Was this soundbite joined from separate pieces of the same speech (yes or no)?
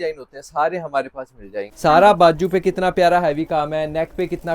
yes